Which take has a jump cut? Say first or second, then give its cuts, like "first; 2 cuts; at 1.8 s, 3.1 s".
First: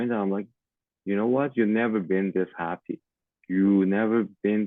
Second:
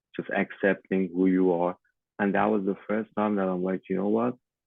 second; 1 cut; at 1.9 s